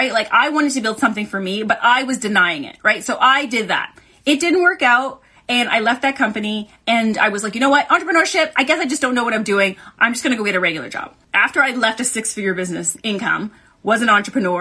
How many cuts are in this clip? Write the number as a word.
two